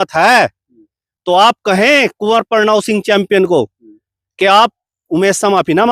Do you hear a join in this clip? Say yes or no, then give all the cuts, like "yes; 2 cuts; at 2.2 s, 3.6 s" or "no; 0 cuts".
no; 0 cuts